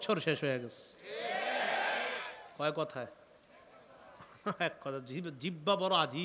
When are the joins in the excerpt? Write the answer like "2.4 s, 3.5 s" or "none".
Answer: none